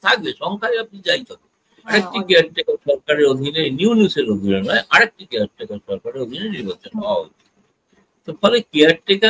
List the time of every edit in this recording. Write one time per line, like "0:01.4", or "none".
0:01.9

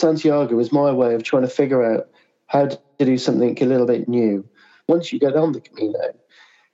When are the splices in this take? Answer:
0:04.8

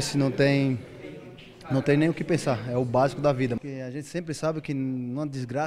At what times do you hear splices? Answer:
0:03.6

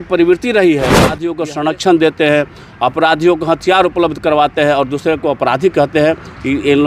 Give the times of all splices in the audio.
0:01.3

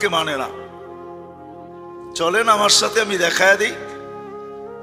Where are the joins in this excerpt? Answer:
0:03.7

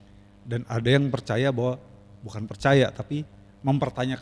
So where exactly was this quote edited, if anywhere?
none

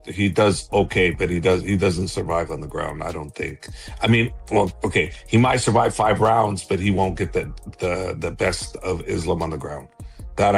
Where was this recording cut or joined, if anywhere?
0:08.7

